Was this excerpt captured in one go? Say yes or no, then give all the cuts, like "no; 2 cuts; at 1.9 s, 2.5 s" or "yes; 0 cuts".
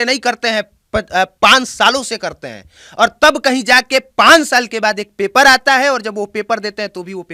yes; 0 cuts